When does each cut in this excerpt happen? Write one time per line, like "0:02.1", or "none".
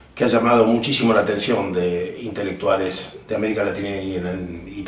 none

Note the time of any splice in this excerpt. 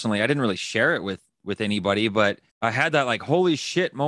0:02.5

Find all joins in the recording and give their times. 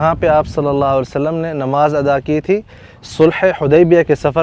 none

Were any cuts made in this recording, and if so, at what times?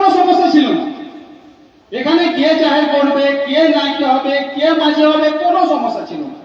none

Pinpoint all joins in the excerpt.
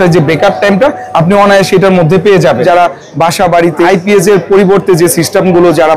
0:02.6
0:03.9

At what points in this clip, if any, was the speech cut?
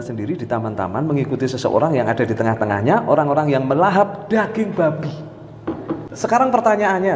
0:06.1

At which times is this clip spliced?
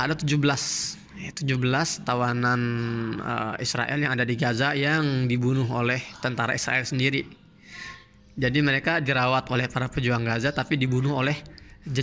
none

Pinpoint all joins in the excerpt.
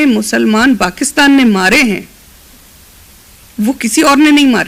none

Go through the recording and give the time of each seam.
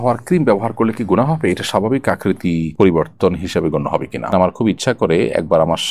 0:04.3

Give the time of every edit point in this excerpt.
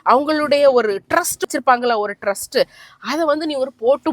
0:01.4

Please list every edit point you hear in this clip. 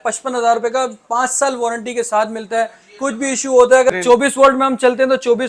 0:03.9

